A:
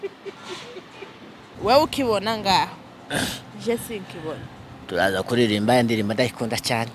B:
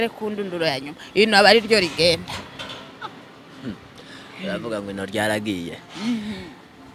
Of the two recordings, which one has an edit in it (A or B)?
A